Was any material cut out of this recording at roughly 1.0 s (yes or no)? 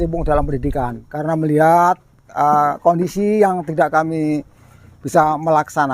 yes